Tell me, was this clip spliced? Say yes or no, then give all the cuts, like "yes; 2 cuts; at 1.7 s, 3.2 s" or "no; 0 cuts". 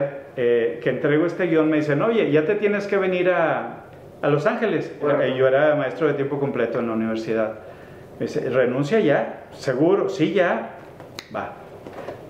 yes; 1 cut; at 5.0 s